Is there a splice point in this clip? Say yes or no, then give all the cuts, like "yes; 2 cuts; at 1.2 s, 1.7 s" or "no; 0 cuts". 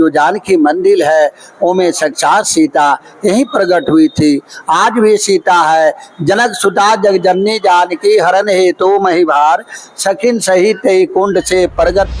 no; 0 cuts